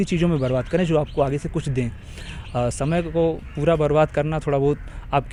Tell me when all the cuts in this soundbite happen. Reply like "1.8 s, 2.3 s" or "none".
none

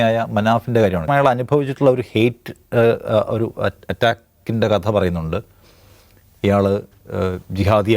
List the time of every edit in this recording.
1.1 s

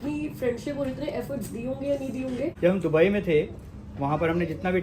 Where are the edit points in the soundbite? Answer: 2.5 s

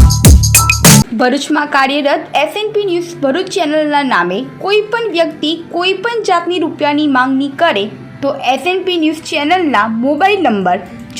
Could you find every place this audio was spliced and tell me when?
1.1 s

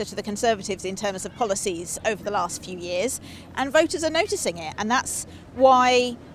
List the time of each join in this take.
none

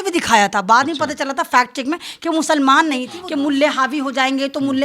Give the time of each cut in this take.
3.2 s

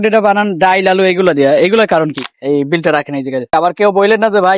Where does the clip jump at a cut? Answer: 2.3 s, 3.5 s

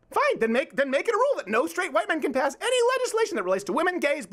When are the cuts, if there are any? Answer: none

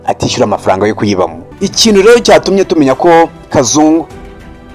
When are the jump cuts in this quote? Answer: 1.4 s

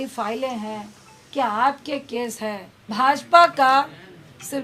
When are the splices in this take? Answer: 2.9 s

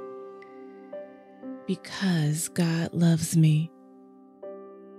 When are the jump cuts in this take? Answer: 1.6 s, 3.8 s

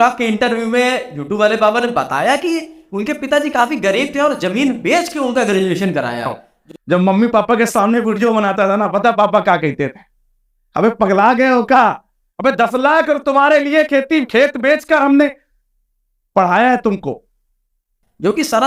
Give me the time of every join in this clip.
none

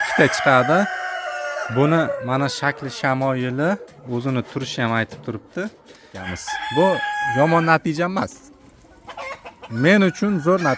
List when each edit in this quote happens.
6.2 s

